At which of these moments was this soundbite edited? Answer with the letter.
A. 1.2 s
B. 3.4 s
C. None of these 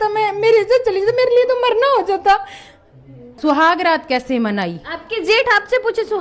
B